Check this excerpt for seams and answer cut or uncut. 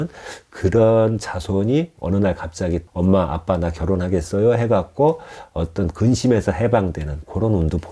cut